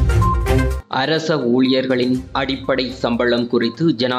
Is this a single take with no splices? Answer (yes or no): no